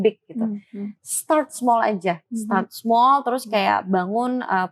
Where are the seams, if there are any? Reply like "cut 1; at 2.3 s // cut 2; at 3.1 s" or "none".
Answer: none